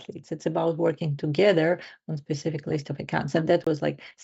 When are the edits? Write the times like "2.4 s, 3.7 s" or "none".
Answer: none